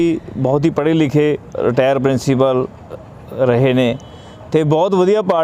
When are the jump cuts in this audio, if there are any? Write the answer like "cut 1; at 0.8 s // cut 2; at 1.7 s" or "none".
cut 1; at 1.5 s